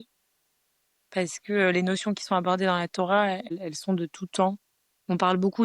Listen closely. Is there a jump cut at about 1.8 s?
no; 1 cut; at 3.5 s

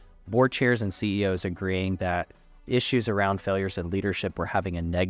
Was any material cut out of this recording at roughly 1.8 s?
no; 0 cuts

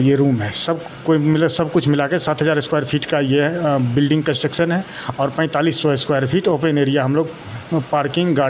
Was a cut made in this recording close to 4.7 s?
no; 0 cuts

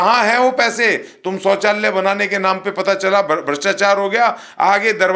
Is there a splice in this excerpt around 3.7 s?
no; 0 cuts

